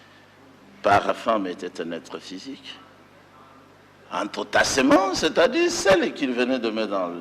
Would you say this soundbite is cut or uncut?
cut